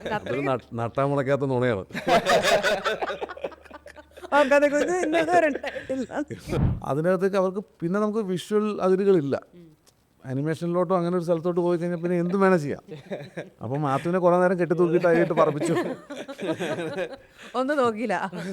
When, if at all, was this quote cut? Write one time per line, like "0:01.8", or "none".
0:06.7